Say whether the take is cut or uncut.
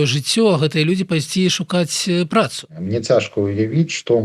cut